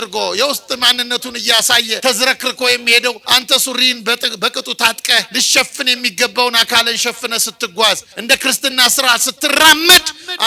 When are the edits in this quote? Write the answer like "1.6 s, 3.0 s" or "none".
2.0 s, 3.2 s, 5.3 s, 8.1 s